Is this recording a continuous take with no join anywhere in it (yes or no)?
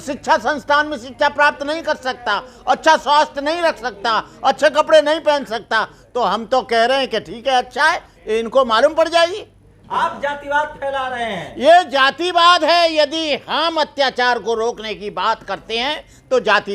yes